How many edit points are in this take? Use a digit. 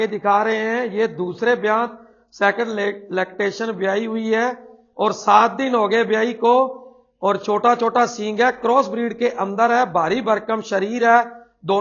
0